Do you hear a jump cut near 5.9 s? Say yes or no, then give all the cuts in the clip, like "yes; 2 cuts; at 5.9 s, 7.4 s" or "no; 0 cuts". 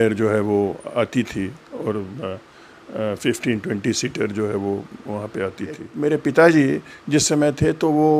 yes; 1 cut; at 5.9 s